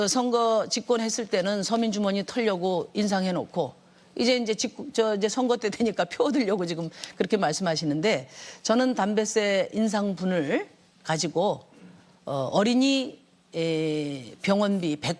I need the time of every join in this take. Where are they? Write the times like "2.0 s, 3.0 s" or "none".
2.0 s